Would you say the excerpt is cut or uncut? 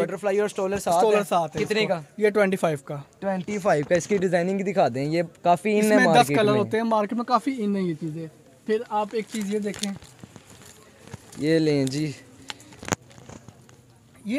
uncut